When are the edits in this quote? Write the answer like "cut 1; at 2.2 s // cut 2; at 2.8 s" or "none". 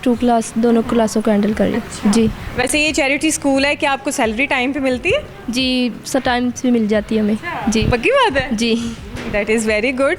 none